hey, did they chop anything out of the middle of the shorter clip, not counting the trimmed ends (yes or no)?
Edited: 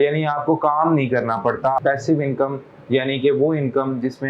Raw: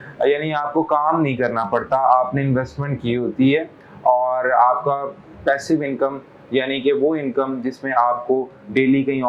yes